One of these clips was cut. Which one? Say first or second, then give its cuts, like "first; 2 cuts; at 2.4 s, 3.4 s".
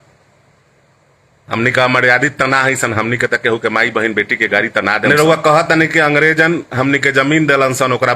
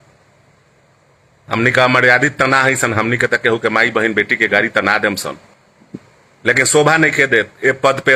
first; 1 cut; at 5.0 s